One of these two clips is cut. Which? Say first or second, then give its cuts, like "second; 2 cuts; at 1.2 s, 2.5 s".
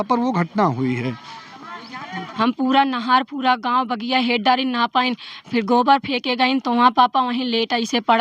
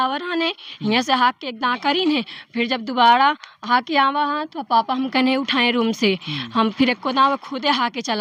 first; 1 cut; at 2.2 s